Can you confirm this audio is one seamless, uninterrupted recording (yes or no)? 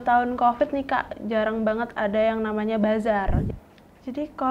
no